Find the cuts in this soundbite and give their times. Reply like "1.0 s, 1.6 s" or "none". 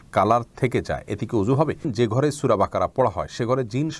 1.9 s